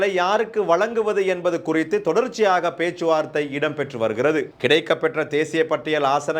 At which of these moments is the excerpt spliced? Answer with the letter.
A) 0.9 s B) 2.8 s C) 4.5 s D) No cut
D